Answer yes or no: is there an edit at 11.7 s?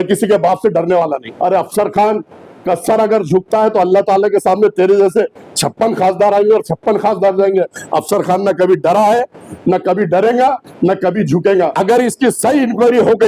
yes